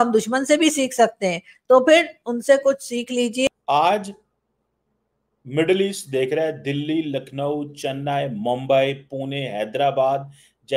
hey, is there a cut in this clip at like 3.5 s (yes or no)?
yes